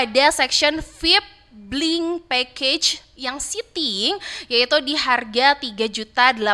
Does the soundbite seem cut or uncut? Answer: uncut